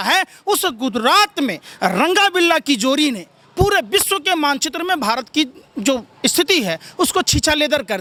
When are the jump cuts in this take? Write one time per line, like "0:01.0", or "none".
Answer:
none